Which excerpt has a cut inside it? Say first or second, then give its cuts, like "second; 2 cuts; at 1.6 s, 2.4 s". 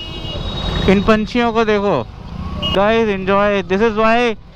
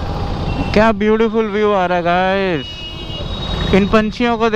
first; 1 cut; at 2.6 s